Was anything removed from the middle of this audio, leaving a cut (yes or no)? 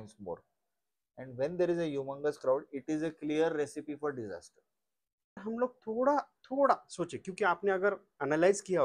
yes